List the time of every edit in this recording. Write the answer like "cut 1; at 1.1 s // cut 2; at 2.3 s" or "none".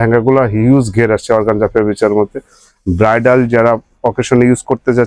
none